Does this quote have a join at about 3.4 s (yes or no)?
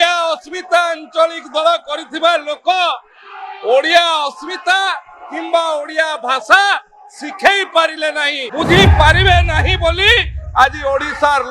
no